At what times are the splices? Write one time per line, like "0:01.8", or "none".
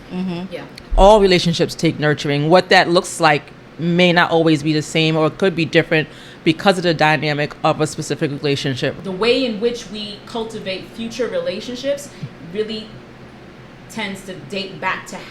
0:09.0

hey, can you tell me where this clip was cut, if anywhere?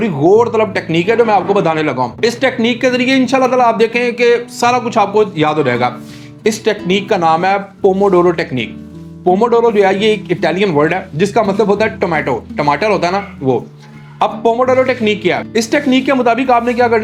none

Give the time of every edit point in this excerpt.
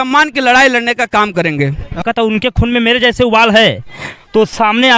0:02.0

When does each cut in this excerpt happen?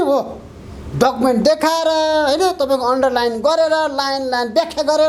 none

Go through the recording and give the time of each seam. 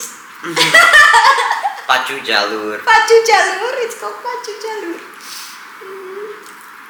none

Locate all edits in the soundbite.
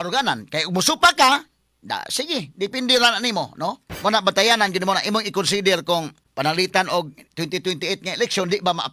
0:03.9
0:06.2

